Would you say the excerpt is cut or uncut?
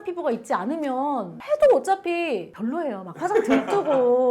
cut